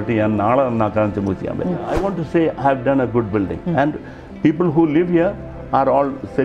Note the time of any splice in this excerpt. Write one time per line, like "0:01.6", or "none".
0:01.9